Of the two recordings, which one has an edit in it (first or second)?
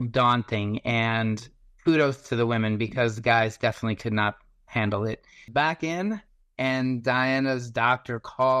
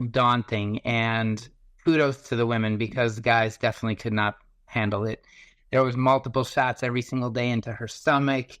first